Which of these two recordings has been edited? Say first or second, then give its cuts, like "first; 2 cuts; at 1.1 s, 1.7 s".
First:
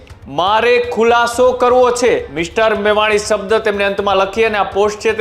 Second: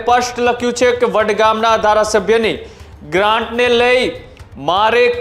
first; 1 cut; at 2.3 s